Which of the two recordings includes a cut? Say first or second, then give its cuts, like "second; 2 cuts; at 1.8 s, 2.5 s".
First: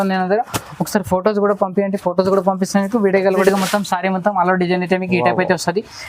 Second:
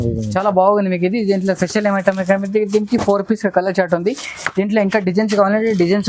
first; 1 cut; at 3.4 s